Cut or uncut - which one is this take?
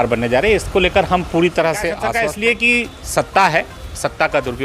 cut